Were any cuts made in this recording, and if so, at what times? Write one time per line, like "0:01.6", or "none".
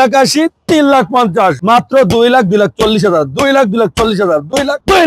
0:01.6